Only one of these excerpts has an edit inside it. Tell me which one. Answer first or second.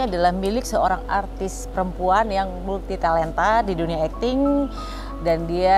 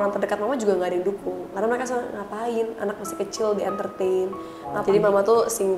second